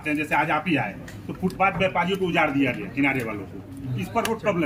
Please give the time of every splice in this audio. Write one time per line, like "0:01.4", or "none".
none